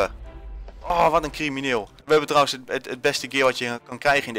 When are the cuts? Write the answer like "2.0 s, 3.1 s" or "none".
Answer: 1.9 s

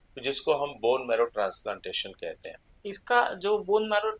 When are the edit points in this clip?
2.5 s

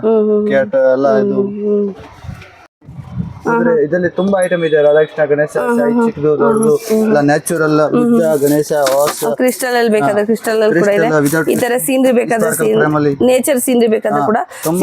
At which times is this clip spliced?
2.7 s

